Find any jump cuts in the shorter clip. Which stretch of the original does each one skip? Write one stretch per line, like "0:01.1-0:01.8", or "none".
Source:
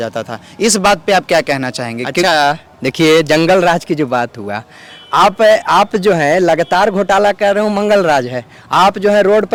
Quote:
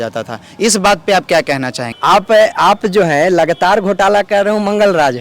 0:01.8-0:04.9